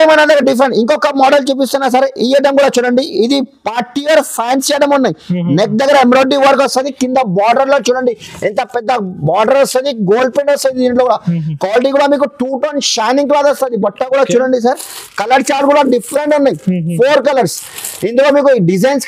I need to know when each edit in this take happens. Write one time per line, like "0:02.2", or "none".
none